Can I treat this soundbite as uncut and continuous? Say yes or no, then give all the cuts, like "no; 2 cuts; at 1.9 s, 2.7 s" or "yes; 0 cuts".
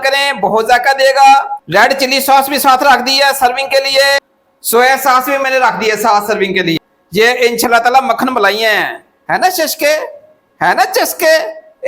no; 2 cuts; at 1.6 s, 6.8 s